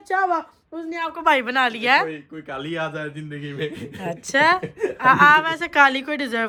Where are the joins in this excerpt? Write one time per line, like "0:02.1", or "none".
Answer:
none